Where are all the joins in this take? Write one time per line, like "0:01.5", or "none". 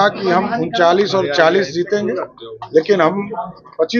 none

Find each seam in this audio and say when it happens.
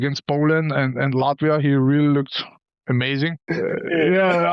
0:03.5

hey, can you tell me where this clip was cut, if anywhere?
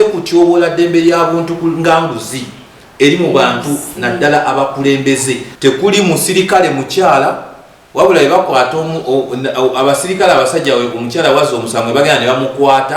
0:05.5

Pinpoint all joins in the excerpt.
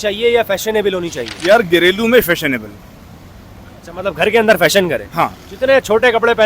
0:01.3

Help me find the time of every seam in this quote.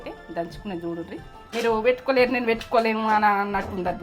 0:01.3

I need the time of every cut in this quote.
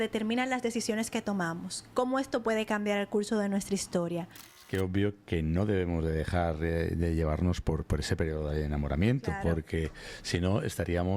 0:04.6

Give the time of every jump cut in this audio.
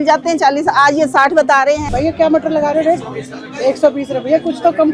0:01.8

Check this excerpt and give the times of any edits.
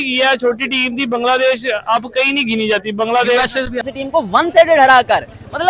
0:03.9

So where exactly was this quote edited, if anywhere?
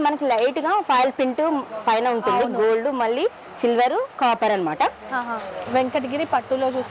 0:05.5

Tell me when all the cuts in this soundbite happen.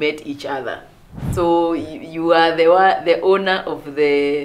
0:01.2

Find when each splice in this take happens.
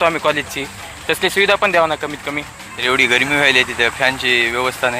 0:02.6

